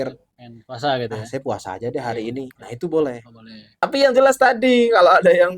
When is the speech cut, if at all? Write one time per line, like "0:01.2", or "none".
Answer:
0:03.8